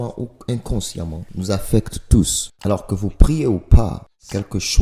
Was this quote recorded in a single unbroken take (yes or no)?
no